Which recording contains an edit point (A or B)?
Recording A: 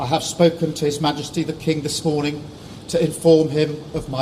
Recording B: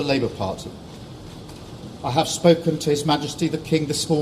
B